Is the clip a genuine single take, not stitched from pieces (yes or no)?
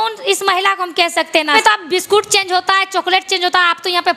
no